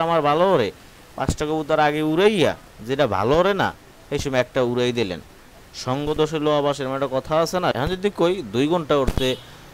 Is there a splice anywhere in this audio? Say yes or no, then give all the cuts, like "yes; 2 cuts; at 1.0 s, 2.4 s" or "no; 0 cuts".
yes; 1 cut; at 7.8 s